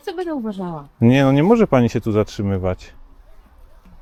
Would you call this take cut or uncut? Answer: uncut